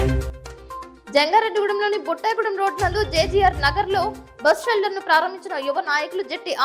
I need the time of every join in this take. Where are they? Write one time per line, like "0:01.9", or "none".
0:00.9